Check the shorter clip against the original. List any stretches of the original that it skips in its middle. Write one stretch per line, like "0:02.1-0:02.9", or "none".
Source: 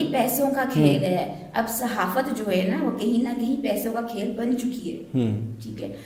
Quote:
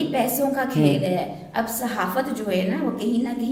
none